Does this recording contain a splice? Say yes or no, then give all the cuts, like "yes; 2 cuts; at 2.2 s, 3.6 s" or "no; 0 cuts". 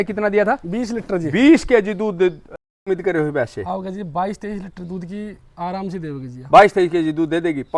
yes; 1 cut; at 2.9 s